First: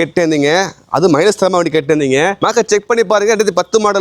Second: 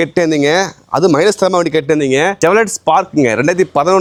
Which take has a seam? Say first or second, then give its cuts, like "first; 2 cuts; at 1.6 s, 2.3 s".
first; 1 cut; at 2.4 s